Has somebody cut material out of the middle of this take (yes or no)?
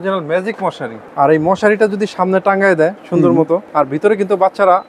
yes